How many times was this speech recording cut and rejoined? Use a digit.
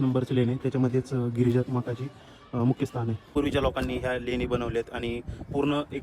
1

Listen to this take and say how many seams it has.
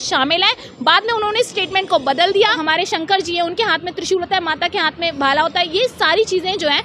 1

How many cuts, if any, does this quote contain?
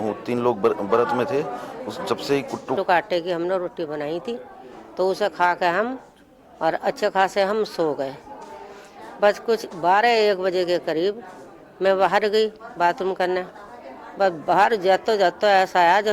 1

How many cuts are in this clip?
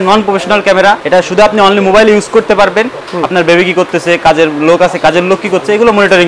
2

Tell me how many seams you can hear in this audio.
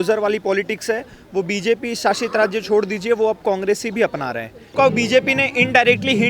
1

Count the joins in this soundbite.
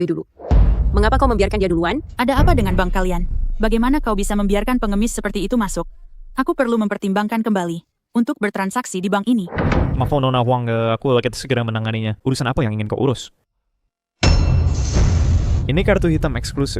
1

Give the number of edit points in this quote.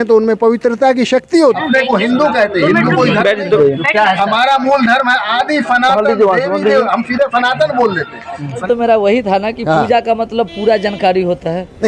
3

